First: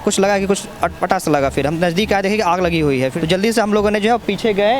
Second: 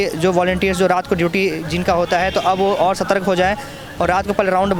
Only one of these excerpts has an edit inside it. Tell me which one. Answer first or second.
first